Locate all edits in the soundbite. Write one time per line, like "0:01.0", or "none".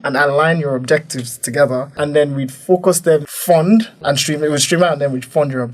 0:01.9
0:03.3
0:03.9